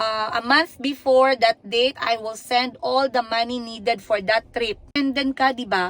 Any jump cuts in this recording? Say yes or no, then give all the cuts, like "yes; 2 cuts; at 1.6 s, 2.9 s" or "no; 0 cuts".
yes; 1 cut; at 4.9 s